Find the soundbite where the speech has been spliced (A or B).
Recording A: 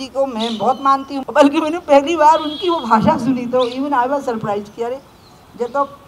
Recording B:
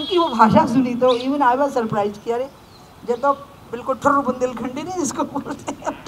A